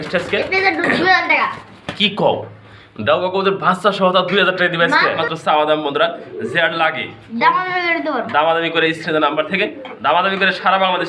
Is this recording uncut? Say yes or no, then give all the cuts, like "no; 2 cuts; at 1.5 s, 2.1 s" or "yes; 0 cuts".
no; 1 cut; at 5.2 s